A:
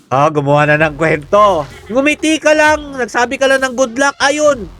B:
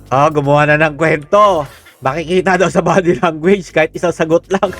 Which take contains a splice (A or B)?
A